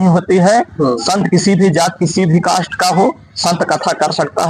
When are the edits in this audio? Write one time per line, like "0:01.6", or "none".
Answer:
none